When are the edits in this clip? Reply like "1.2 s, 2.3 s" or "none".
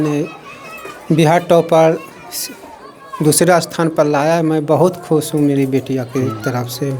none